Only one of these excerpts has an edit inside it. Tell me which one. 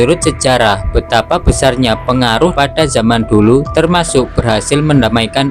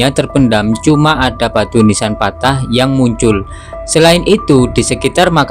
first; 1 cut; at 2.5 s

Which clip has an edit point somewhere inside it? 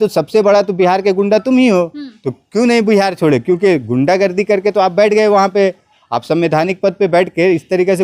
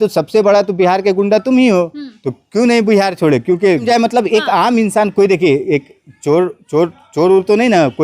second; 1 cut; at 3.8 s

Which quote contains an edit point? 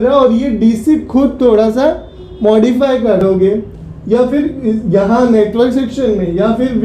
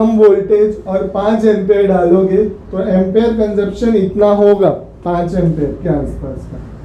first; 1 cut; at 3.2 s

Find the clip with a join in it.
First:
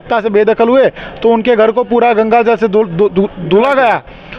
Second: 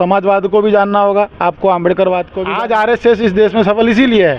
second; 1 cut; at 2.3 s

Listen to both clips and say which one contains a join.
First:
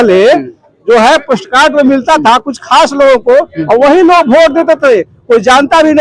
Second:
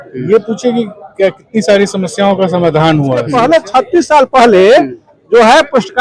second; 1 cut; at 3.3 s

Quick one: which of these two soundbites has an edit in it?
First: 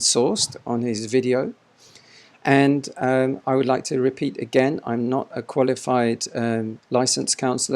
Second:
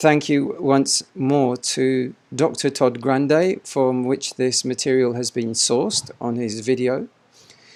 first; 1 cut; at 6.8 s

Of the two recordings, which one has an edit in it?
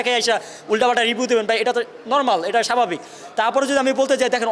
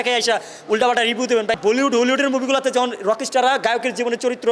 second; 1 cut; at 1.6 s

